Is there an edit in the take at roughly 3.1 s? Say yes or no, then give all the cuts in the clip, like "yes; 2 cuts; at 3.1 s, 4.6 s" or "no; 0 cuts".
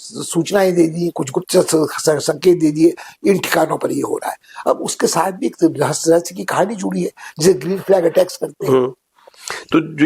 no; 0 cuts